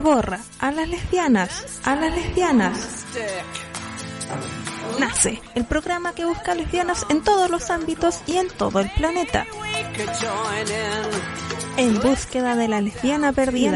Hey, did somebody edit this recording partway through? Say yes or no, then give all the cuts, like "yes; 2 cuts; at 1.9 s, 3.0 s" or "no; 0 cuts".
no; 0 cuts